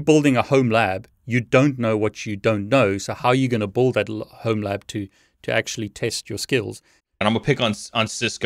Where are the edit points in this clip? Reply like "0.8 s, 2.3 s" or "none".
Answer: 7.2 s